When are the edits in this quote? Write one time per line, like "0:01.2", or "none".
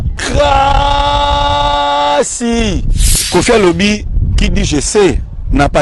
0:03.1